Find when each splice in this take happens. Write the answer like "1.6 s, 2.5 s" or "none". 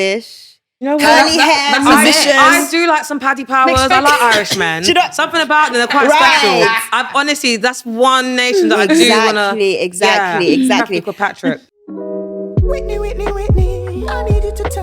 11.7 s